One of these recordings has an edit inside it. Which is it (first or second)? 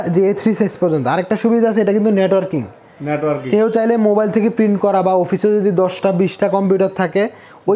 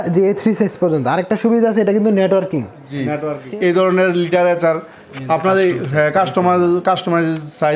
second